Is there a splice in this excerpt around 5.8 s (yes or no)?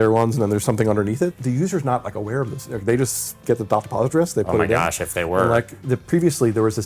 yes